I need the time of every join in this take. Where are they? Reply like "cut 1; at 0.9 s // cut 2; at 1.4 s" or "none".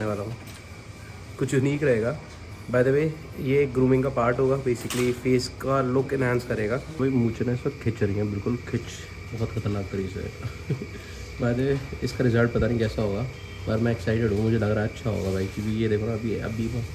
cut 1; at 7.0 s

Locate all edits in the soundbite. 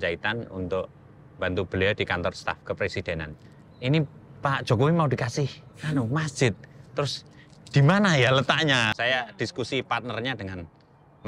cut 1; at 3.3 s // cut 2; at 8.9 s

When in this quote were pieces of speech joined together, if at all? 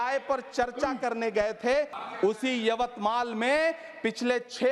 cut 1; at 2.0 s

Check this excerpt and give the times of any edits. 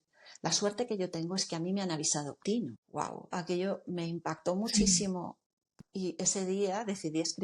cut 1; at 2.6 s

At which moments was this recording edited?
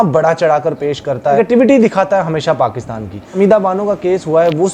cut 1; at 1.4 s // cut 2; at 3.3 s

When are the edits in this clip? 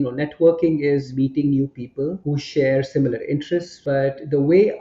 cut 1; at 1.1 s // cut 2; at 2.2 s // cut 3; at 3.7 s

